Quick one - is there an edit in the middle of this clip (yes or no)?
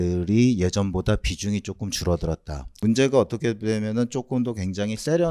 yes